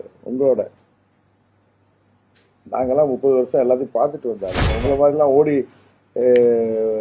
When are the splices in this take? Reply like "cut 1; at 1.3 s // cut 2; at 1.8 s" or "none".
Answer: cut 1; at 4.7 s